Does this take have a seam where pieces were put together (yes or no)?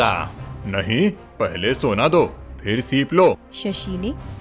yes